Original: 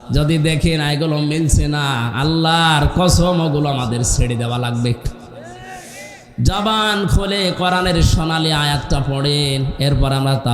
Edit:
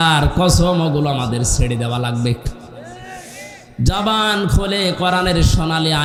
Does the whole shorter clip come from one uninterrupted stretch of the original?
yes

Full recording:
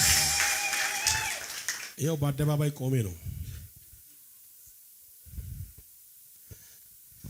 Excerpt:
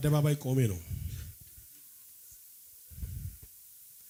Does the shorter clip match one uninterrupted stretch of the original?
yes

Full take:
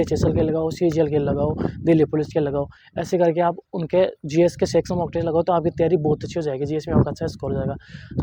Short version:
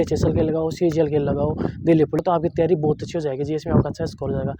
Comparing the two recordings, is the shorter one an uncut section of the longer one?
no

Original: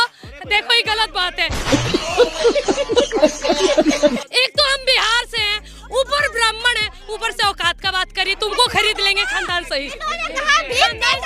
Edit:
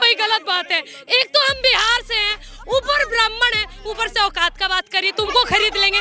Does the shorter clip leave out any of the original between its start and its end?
yes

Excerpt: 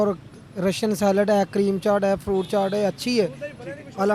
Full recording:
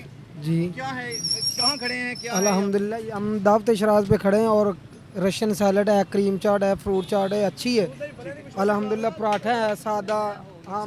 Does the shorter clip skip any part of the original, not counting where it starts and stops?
no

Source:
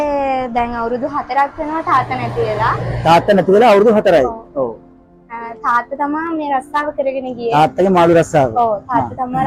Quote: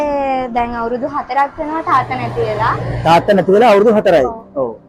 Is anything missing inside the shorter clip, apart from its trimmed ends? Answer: no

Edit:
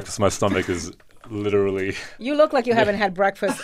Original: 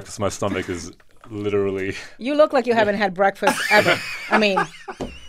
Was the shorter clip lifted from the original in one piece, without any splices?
yes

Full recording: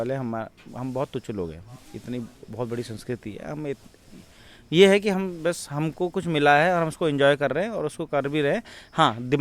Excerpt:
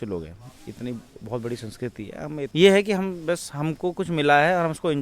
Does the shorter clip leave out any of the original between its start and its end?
yes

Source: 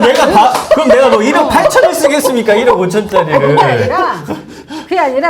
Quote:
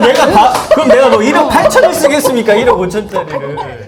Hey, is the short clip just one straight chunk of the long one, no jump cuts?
yes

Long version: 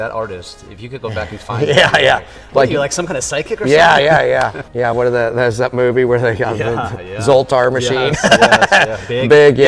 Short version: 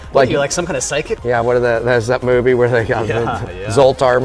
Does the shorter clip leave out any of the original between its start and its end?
yes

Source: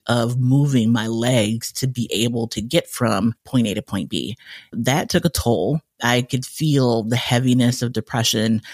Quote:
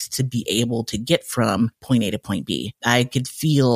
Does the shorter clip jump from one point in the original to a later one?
yes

